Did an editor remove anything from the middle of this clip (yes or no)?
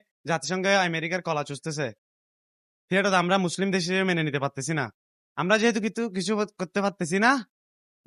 no